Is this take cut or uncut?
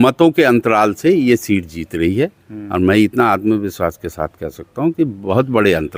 uncut